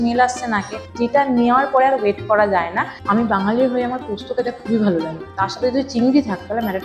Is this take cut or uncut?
cut